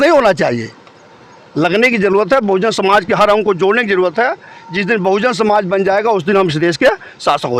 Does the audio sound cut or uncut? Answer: uncut